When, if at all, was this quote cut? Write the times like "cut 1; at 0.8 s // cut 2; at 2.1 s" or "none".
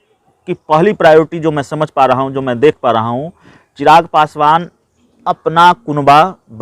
none